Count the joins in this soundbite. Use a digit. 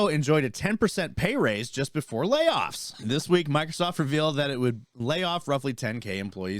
1